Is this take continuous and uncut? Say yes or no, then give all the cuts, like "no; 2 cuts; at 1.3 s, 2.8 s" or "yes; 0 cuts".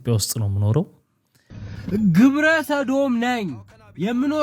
no; 1 cut; at 1.7 s